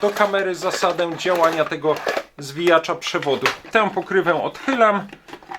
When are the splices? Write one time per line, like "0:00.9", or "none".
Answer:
0:03.7